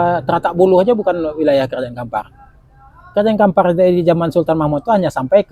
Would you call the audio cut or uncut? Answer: uncut